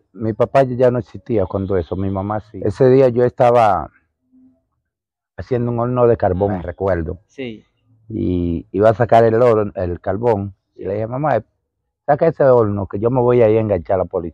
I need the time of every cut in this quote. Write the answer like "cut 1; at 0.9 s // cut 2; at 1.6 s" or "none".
cut 1; at 2.5 s // cut 2; at 6.7 s